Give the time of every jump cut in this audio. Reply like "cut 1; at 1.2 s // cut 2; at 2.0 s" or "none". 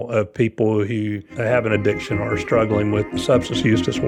cut 1; at 1.3 s // cut 2; at 3.1 s